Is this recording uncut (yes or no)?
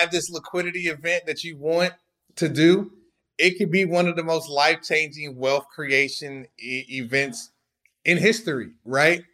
yes